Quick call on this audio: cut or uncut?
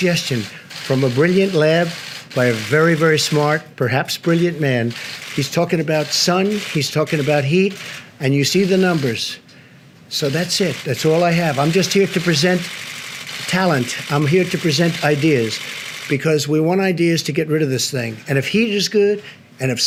uncut